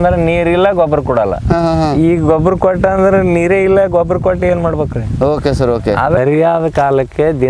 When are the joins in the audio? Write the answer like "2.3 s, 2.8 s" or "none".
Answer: none

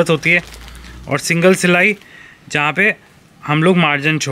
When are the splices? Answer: none

